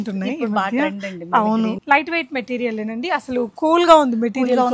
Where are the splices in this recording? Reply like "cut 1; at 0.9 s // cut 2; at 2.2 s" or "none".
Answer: cut 1; at 1.8 s